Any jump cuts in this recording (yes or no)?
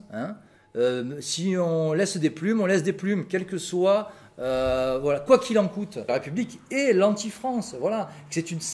yes